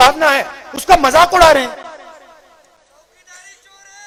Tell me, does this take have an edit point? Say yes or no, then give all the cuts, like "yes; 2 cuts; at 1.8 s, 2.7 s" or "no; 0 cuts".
no; 0 cuts